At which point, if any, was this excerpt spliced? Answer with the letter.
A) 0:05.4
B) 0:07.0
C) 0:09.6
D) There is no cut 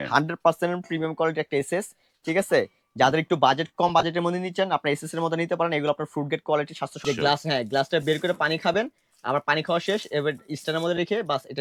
B